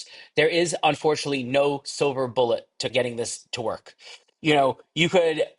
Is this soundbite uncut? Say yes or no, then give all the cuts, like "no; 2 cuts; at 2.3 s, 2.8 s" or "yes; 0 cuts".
no; 1 cut; at 2.9 s